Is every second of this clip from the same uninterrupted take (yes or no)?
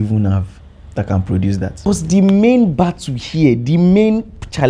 no